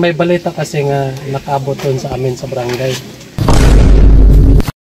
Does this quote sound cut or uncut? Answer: uncut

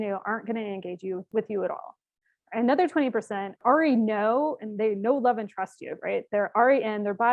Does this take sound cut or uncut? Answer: cut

